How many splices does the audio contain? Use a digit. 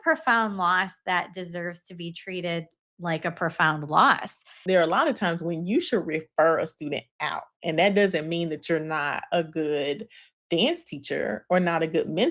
1